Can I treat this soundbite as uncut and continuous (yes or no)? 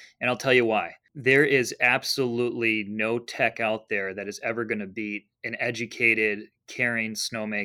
no